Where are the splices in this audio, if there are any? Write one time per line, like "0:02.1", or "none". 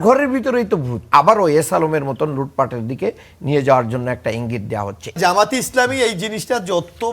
0:01.1
0:05.2